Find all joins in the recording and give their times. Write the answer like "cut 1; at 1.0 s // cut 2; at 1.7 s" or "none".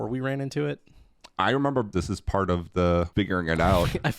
cut 1; at 1.9 s // cut 2; at 3.1 s

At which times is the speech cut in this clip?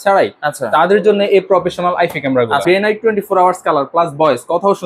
cut 1; at 2.6 s

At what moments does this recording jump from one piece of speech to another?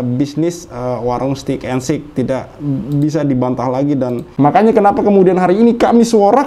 cut 1; at 4.3 s

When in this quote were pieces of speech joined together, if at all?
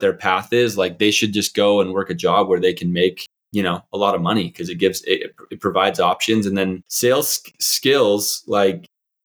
cut 1; at 6.9 s

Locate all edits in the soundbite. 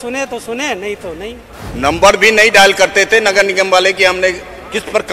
cut 1; at 1.5 s

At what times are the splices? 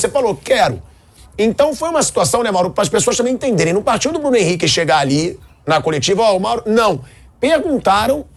none

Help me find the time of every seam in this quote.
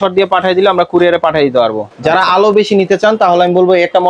cut 1; at 1.9 s

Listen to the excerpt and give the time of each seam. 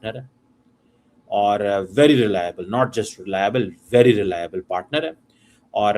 none

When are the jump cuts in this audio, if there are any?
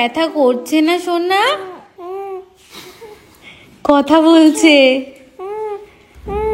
none

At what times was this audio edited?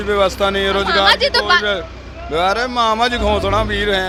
none

